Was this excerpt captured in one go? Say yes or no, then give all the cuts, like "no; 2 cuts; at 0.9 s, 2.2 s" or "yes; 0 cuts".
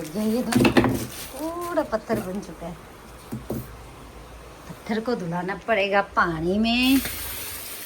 yes; 0 cuts